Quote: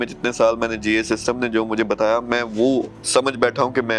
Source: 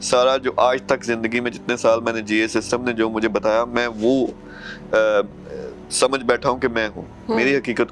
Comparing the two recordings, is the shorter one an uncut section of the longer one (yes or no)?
no